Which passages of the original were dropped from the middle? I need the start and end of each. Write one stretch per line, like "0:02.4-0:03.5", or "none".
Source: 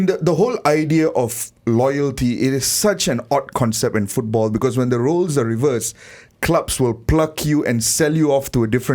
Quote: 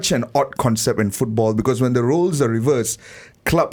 none